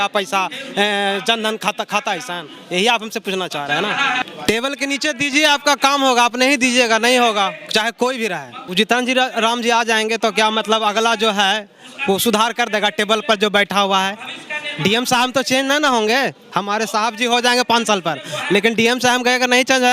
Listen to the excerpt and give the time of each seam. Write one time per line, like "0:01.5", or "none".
0:04.3
0:08.6